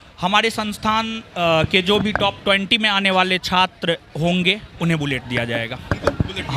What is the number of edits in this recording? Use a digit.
0